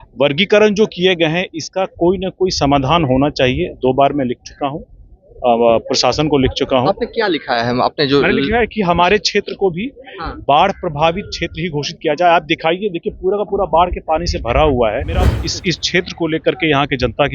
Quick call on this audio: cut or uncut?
cut